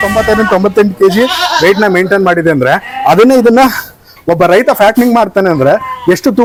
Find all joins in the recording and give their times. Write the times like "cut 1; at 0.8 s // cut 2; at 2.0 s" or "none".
none